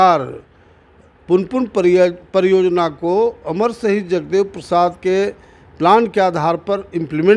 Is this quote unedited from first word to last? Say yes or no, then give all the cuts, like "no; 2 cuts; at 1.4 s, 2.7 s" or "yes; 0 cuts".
yes; 0 cuts